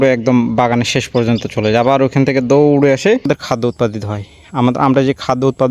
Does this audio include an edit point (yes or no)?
yes